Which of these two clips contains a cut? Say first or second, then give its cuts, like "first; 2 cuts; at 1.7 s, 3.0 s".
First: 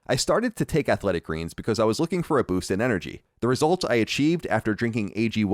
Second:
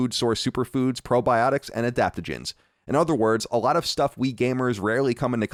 first; 1 cut; at 3.2 s